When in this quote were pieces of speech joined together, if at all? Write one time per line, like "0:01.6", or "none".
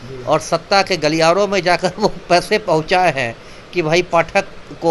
none